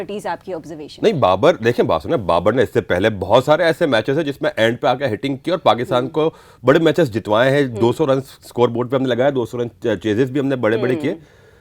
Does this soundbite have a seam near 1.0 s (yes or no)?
no